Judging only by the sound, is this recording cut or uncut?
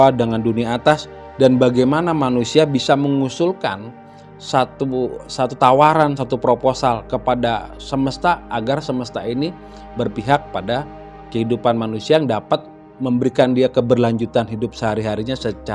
uncut